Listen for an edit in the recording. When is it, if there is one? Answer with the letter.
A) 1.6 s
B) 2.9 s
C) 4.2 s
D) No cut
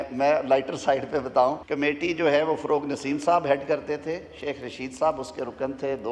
A